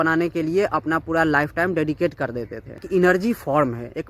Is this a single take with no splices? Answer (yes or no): no